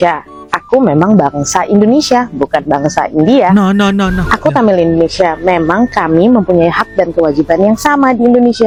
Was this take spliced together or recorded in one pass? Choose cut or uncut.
uncut